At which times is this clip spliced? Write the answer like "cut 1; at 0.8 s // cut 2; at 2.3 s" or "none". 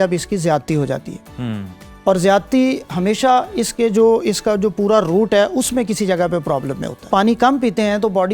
cut 1; at 7.1 s